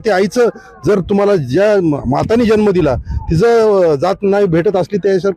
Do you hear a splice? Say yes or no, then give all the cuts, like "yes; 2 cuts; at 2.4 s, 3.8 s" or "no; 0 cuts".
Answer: no; 0 cuts